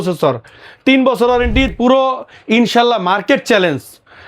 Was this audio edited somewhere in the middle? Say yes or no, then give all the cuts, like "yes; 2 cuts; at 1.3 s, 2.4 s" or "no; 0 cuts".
yes; 1 cut; at 1.7 s